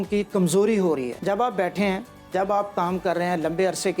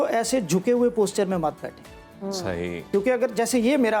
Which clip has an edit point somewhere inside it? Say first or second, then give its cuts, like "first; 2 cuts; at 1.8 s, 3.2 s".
first; 1 cut; at 1.1 s